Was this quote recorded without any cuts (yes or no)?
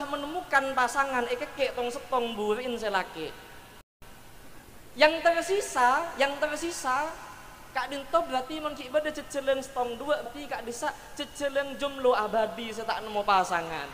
yes